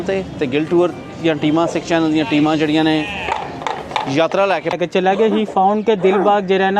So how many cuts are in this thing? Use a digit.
1